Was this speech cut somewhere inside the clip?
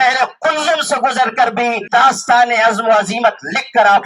yes; 1 cut; at 1.8 s

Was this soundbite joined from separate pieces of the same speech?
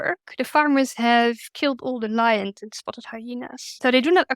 yes; 1 cut; at 1.5 s

